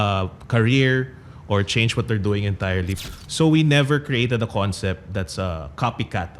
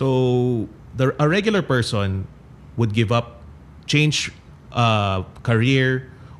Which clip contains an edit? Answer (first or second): first